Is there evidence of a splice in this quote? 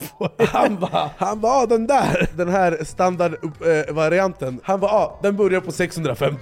yes; 3 cuts; at 1.1 s, 2.3 s, 4.5 s

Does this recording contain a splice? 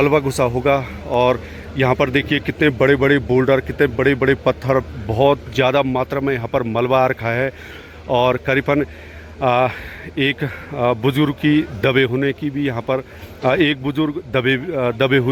no; 0 cuts

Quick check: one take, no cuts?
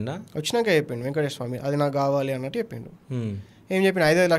yes; 0 cuts

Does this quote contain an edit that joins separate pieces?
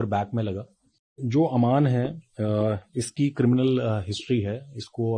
yes; 1 cut; at 1.2 s

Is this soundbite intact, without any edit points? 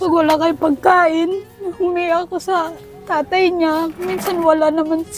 yes; 0 cuts

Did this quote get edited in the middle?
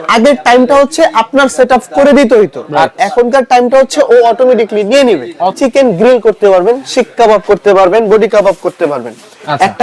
yes; 1 cut; at 5.6 s

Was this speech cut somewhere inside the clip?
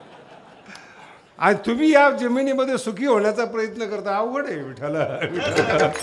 no; 0 cuts

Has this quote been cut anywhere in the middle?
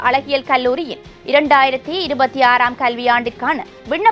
no; 0 cuts

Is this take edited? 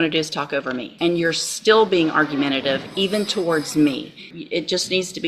yes; 2 cuts; at 0.9 s, 4.3 s

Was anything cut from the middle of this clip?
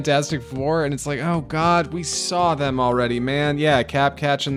no; 0 cuts

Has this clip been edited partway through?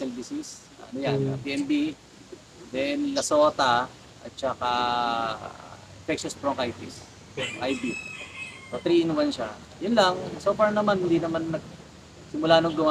no; 0 cuts

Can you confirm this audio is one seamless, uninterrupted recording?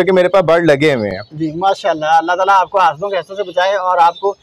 yes; 0 cuts

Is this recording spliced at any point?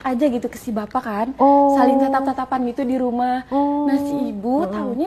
no; 0 cuts

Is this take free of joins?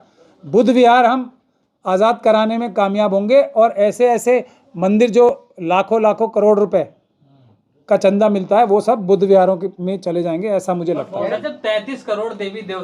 no; 1 cut; at 11.3 s

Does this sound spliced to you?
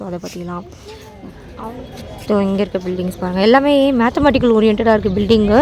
yes; 1 cut; at 1.4 s

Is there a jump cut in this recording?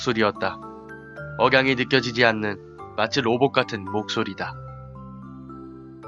yes; 1 cut; at 1.6 s

